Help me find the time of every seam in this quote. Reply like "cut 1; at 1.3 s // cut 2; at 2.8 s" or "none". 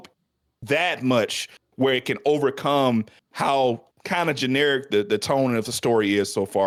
none